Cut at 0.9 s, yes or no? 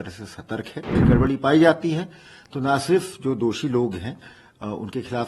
yes